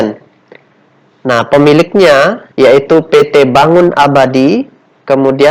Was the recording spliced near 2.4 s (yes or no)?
yes